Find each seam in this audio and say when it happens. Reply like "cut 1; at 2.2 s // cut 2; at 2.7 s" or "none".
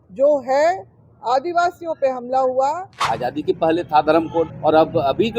cut 1; at 2.9 s // cut 2; at 4.5 s